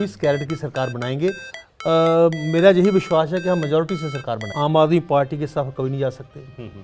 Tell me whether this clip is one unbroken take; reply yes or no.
no